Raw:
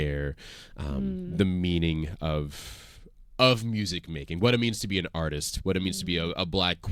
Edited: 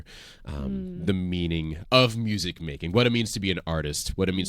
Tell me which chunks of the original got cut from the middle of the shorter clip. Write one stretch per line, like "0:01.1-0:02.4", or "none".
0:02.1-0:03.2

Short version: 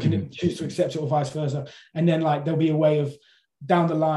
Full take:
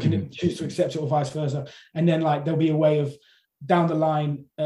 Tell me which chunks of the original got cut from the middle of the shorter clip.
none

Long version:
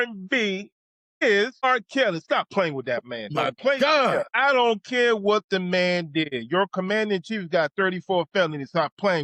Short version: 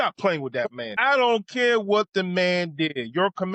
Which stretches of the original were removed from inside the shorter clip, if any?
0:03.3-0:04.3

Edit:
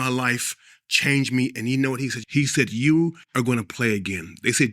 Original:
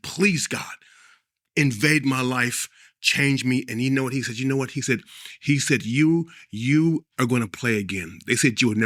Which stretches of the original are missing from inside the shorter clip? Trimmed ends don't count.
0:04.3-0:05.3
0:06.4-0:07.1

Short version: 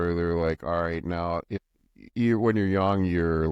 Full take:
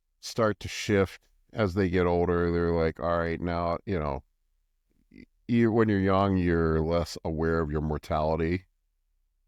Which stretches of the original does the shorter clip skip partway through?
0:03.9-0:04.9

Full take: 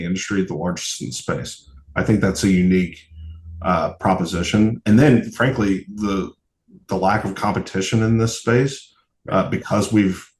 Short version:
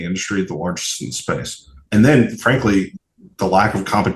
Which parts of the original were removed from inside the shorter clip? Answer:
0:01.8-0:04.8
0:05.9-0:06.5

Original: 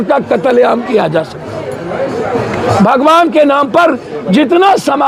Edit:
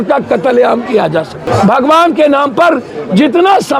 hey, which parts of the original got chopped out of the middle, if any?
0:01.4-0:02.6

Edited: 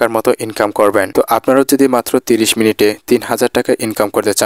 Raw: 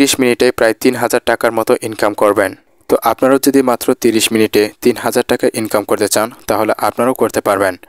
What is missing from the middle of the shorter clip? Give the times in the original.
0:02.5-0:02.8

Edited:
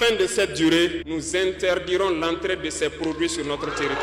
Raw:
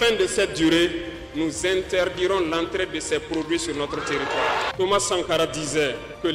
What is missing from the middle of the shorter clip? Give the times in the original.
0:01.1-0:01.4

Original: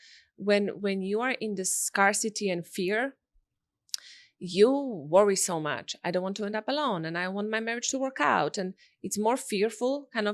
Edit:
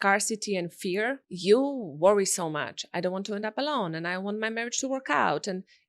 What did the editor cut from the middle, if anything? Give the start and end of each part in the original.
0:03.2-0:04.4

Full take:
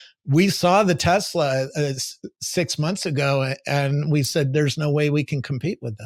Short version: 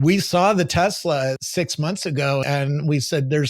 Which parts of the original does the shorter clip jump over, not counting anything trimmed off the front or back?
0:01.7-0:02.4
0:03.4-0:03.7

